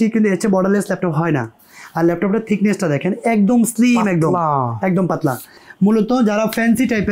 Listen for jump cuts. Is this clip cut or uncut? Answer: uncut